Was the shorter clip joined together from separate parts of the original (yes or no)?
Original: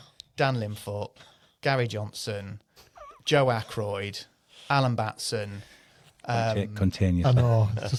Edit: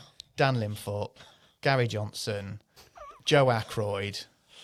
no